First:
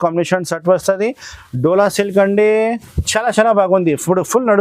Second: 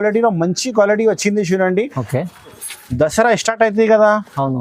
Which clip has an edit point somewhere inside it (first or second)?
second